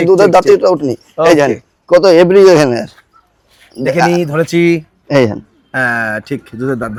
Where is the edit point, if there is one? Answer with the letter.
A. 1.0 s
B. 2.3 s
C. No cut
C